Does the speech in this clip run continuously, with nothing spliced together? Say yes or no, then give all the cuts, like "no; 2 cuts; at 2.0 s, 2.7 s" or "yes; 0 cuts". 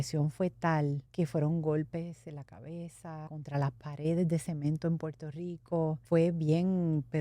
no; 3 cuts; at 1.0 s, 3.3 s, 6.0 s